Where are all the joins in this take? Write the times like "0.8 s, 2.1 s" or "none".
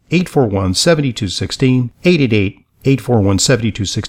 none